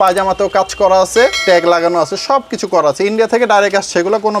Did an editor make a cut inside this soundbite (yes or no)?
yes